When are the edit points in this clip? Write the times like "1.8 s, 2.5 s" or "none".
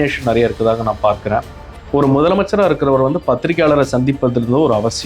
1.6 s